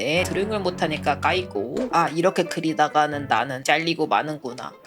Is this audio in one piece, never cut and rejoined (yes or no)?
yes